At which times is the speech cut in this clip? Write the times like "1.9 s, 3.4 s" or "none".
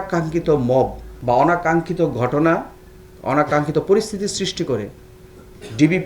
1.1 s